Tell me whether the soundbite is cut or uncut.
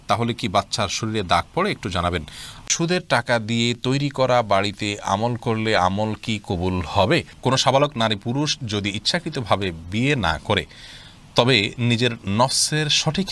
cut